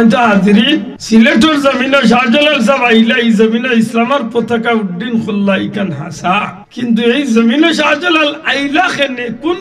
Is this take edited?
yes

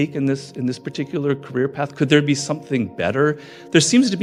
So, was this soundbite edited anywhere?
no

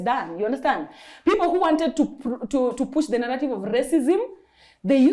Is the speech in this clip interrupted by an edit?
no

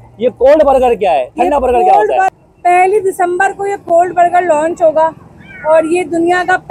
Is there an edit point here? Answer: yes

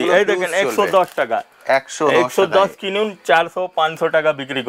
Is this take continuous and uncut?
yes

